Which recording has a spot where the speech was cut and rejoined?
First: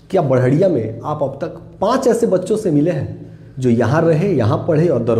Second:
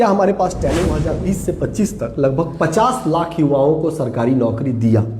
second; 1 cut; at 1.0 s

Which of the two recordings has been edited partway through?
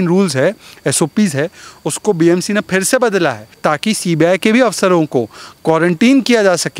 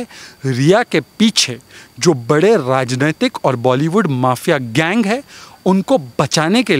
first; 1 cut; at 3.6 s

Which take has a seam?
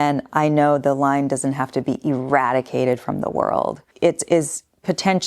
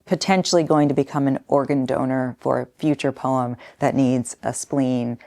first; 1 cut; at 3.9 s

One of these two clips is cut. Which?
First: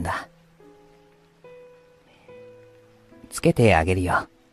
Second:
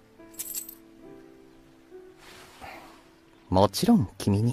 second; 1 cut; at 3.2 s

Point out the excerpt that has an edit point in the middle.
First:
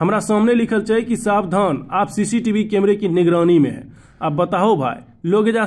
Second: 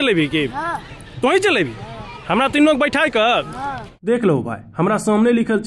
second; 1 cut; at 3.9 s

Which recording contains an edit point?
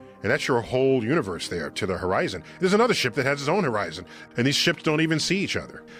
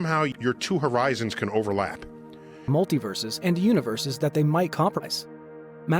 second; 1 cut; at 2.6 s

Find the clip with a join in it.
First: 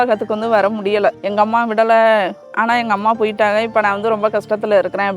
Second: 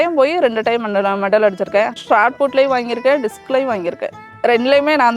first; 1 cut; at 1.2 s

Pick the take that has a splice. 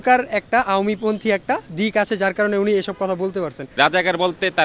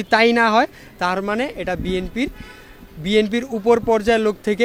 first; 1 cut; at 3.7 s

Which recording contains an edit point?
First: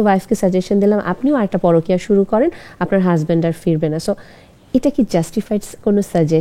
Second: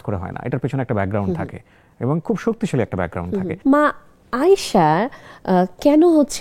second; 1 cut; at 3.5 s

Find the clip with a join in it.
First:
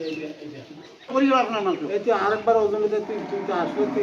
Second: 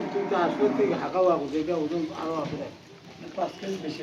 first; 1 cut; at 1.1 s

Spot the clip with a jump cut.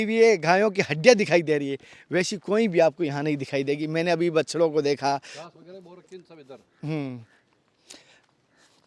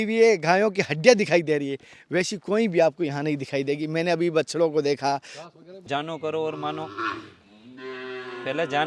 second; 1 cut; at 5.7 s

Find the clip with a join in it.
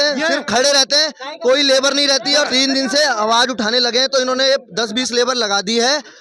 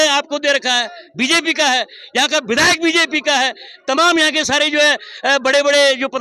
first; 1 cut; at 2.5 s

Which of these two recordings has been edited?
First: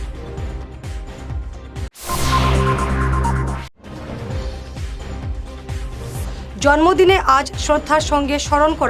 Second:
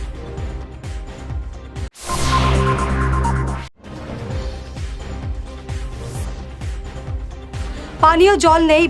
first; 1 cut; at 6.0 s

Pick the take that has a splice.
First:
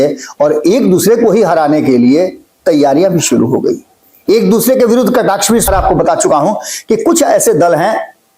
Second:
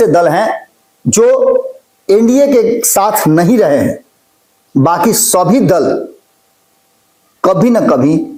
first; 1 cut; at 5.7 s

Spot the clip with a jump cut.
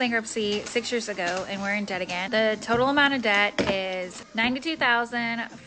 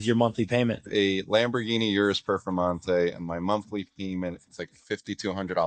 first; 2 cuts; at 2.2 s, 4.2 s

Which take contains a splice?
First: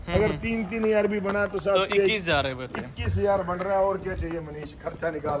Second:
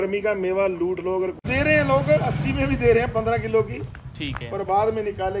second; 1 cut; at 1.4 s

